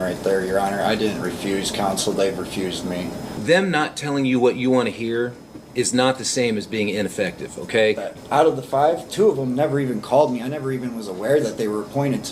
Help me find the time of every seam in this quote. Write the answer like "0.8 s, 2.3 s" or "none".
3.3 s, 8.1 s